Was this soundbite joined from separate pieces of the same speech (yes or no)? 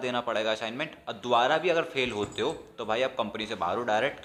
no